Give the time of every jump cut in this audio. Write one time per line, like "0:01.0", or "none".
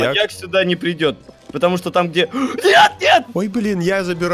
0:03.3